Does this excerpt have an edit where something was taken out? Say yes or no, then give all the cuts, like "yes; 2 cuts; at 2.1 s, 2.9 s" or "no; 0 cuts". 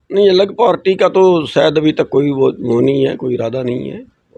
no; 0 cuts